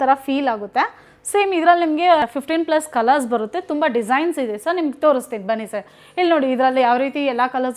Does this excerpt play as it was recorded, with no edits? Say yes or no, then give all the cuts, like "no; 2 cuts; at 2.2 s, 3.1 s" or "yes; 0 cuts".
yes; 0 cuts